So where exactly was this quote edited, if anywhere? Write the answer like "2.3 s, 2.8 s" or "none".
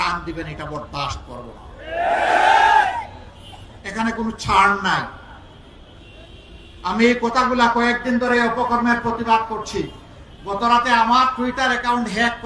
none